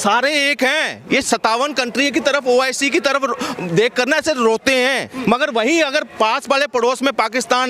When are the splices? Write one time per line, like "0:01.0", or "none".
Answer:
0:05.1